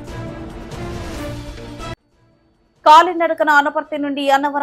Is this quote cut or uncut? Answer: cut